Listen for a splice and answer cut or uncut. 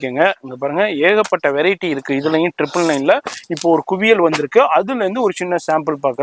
uncut